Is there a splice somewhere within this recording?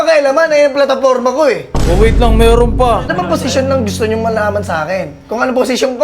yes; 1 cut; at 3.1 s

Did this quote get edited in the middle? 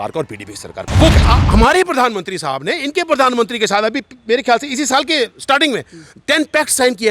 yes; 1 cut; at 1.2 s

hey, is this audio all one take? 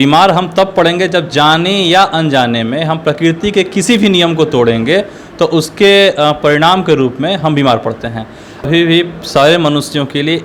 no; 1 cut; at 8.6 s

